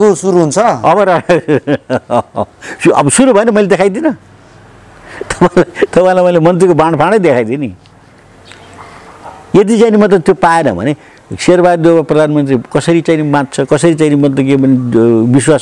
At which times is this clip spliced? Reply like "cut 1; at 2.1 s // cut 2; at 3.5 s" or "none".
none